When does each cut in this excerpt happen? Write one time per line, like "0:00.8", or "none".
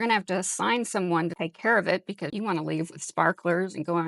0:01.4
0:02.3